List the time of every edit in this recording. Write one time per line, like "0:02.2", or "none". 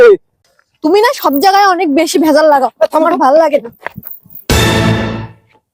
none